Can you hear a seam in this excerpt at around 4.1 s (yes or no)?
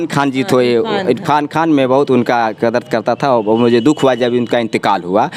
no